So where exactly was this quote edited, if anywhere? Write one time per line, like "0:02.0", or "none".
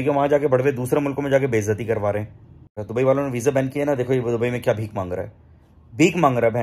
0:02.7